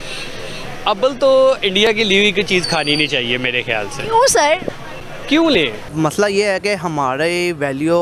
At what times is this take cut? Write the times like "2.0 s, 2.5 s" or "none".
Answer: 5.8 s